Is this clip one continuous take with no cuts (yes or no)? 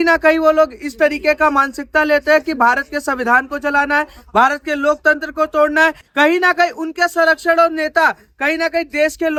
yes